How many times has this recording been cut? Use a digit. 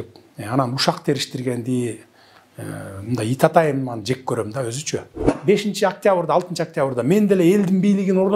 1